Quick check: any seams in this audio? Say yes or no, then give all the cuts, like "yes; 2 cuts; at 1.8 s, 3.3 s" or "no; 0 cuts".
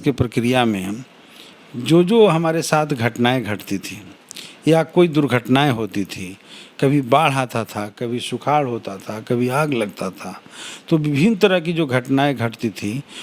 no; 0 cuts